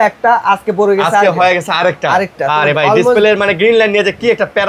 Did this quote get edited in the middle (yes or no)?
no